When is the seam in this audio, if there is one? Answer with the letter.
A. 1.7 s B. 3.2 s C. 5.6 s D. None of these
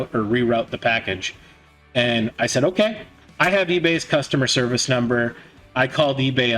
B